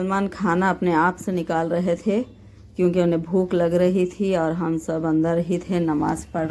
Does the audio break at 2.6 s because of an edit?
no; 0 cuts

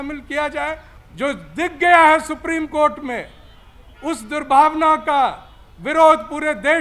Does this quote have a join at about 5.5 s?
no; 1 cut; at 0.9 s

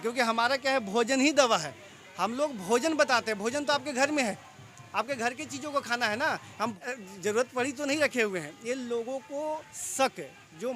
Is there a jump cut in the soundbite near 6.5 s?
yes; 1 cut; at 6.5 s

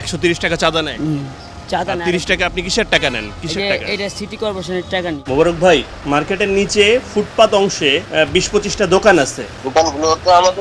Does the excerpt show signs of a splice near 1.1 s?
no; 1 cut; at 5.2 s

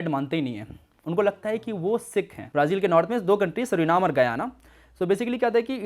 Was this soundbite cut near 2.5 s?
yes; 1 cut; at 2.5 s

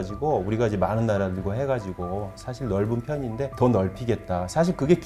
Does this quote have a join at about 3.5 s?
yes; 1 cut; at 3.5 s

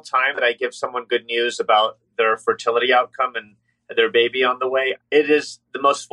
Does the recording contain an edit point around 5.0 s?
yes; 1 cut; at 5.0 s

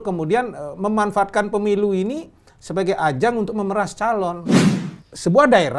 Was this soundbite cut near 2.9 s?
no; 1 cut; at 4.5 s

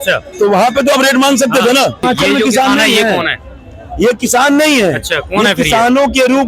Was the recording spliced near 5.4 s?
no; 1 cut; at 2.0 s

